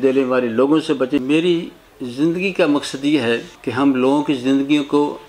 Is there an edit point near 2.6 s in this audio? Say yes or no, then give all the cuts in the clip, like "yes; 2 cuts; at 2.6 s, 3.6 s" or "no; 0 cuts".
no; 1 cut; at 1.2 s